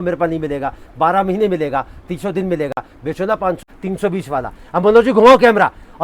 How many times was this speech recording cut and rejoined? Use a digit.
1